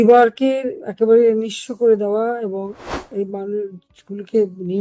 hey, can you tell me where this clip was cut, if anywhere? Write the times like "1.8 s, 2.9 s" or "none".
none